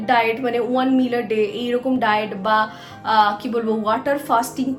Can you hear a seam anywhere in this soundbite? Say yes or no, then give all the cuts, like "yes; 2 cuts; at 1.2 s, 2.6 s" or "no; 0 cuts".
no; 0 cuts